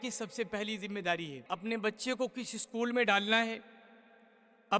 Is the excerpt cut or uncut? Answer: cut